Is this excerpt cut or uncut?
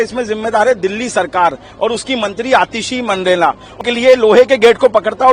cut